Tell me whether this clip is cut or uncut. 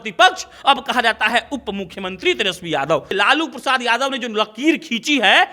cut